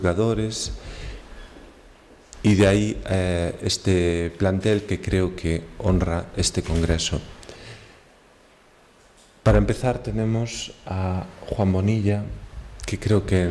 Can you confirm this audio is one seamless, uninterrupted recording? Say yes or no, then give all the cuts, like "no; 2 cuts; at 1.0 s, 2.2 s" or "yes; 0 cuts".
no; 1 cut; at 9.6 s